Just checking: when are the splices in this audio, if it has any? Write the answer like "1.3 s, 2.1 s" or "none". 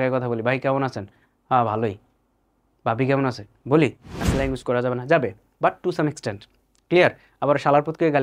4.2 s